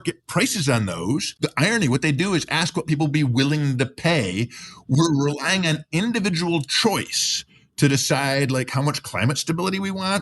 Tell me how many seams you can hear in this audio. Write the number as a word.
one